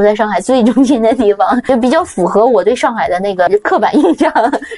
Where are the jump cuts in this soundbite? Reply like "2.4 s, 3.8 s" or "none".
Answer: 1.6 s, 3.5 s